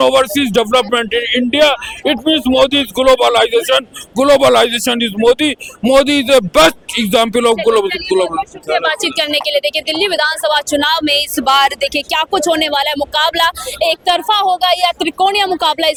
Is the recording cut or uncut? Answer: uncut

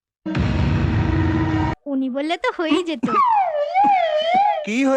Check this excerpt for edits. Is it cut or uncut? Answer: cut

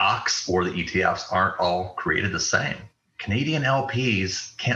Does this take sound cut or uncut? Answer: cut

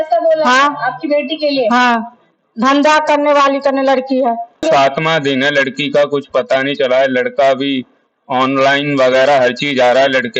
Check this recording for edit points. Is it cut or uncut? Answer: cut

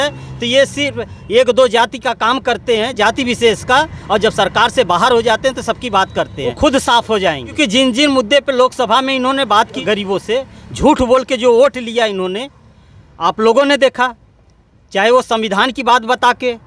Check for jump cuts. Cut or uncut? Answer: cut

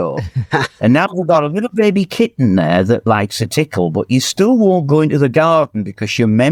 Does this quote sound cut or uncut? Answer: uncut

